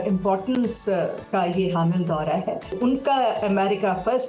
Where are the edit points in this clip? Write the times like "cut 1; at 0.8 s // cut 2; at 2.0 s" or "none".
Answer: cut 1; at 1.2 s // cut 2; at 2.8 s